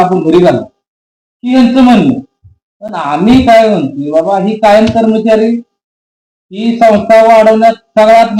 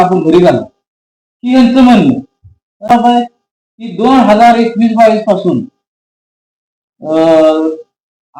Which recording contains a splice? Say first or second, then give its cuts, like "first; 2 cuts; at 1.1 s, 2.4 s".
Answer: second; 1 cut; at 2.9 s